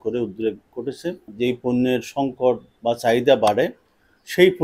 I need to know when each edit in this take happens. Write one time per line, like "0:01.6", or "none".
0:01.3
0:02.7